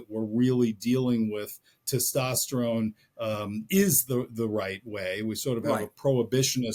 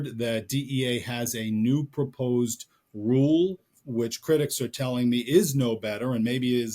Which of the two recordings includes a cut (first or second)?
second